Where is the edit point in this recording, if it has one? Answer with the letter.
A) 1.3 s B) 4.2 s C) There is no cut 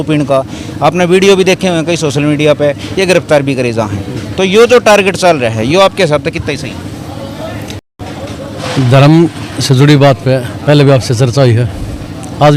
C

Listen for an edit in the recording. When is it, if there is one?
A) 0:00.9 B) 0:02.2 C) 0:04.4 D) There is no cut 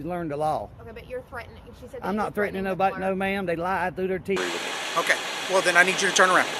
C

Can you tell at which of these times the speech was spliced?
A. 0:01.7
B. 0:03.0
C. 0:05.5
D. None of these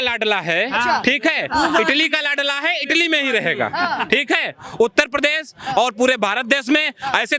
D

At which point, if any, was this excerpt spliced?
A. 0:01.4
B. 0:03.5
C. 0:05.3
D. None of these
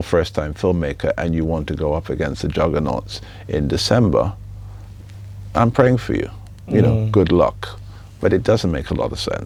D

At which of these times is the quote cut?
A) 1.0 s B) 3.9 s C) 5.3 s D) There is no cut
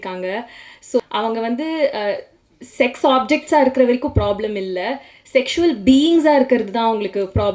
A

